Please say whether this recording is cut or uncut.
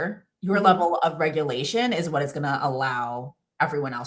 uncut